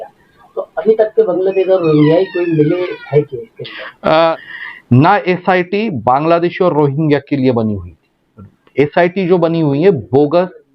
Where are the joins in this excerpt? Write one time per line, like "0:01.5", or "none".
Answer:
0:04.4